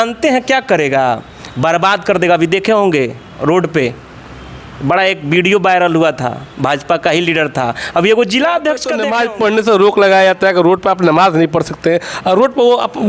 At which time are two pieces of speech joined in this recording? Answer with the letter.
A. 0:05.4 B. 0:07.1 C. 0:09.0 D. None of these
C